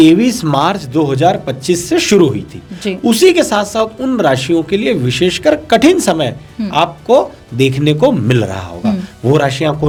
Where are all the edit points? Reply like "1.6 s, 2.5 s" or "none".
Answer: none